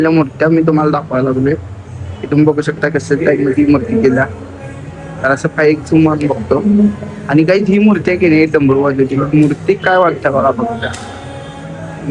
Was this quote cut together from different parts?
no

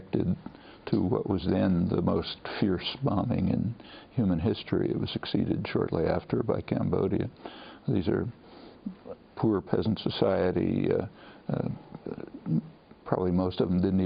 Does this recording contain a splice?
yes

